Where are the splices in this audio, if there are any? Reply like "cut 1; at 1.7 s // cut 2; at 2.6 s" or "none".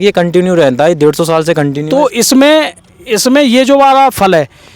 cut 1; at 1.7 s